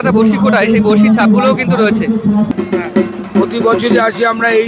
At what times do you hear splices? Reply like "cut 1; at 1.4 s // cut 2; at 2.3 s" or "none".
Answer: cut 1; at 2.5 s

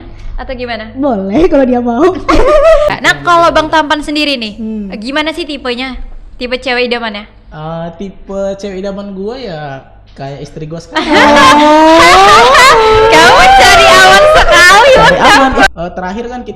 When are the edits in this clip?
cut 1; at 3.0 s // cut 2; at 15.7 s

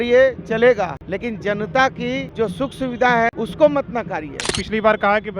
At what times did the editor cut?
cut 1; at 1.0 s // cut 2; at 2.3 s // cut 3; at 3.3 s // cut 4; at 4.5 s

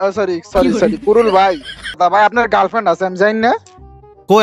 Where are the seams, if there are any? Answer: cut 1; at 1.9 s

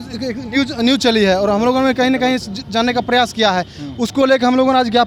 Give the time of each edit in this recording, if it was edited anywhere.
none

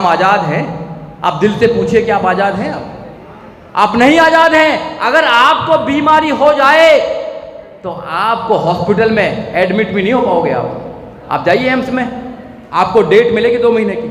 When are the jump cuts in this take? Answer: none

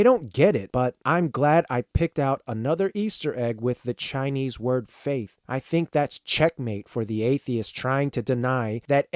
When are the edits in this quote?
none

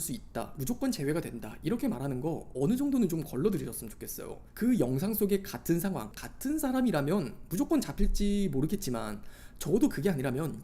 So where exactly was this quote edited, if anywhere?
cut 1; at 6.1 s

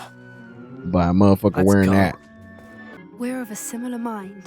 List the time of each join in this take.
cut 1; at 3.0 s

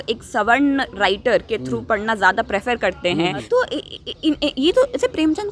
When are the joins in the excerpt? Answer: cut 1; at 3.4 s

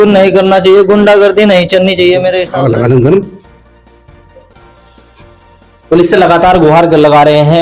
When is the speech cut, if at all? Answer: cut 1; at 2.5 s

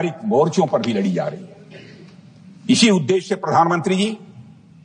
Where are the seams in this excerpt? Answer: none

